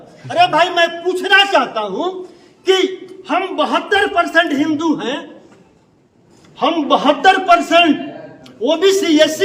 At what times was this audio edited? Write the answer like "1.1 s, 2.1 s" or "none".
none